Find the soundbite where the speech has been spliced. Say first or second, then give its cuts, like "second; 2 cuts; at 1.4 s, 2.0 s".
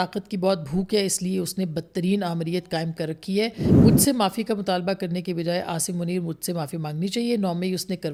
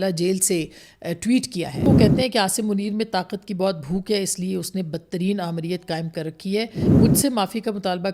second; 1 cut; at 1.9 s